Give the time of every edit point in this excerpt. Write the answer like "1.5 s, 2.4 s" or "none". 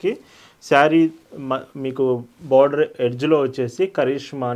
none